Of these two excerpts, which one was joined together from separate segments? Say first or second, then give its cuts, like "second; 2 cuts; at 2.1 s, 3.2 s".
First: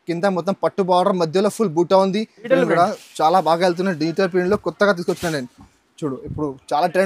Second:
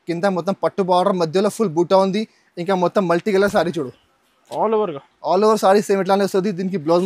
first; 1 cut; at 2.5 s